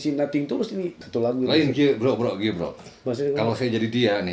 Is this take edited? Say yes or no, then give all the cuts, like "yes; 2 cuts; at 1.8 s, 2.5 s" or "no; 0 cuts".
yes; 1 cut; at 1.0 s